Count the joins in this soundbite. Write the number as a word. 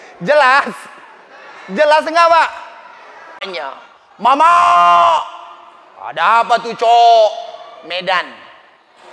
one